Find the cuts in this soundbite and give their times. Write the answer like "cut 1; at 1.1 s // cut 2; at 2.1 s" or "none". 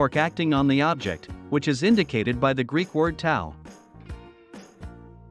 none